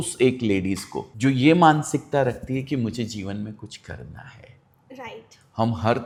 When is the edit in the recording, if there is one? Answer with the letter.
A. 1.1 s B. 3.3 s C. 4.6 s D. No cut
D